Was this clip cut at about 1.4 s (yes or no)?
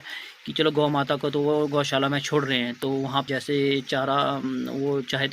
no